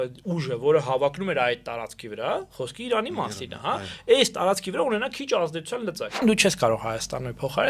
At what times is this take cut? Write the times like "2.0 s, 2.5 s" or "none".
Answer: 6.2 s